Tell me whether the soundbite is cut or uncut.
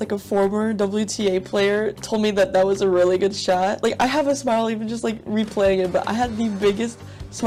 uncut